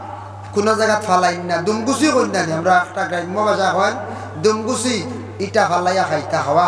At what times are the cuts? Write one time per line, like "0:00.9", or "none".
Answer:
none

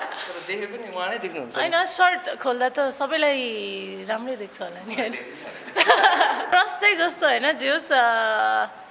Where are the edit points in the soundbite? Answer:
0:06.5

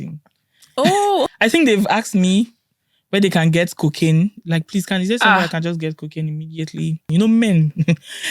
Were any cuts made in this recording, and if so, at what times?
0:01.3
0:07.0

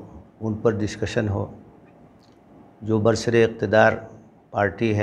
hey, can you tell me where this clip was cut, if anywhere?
none

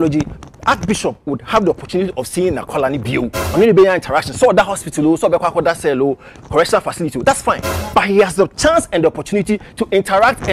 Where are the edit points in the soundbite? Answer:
0:03.4

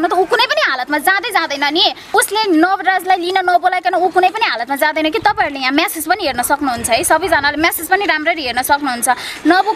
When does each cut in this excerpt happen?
0:02.1

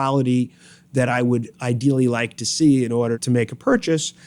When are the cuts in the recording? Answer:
0:03.2

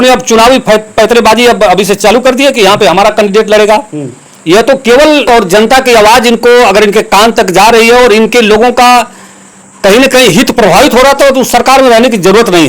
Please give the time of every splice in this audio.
0:05.3

